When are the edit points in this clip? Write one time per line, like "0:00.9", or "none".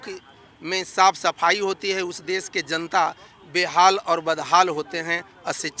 none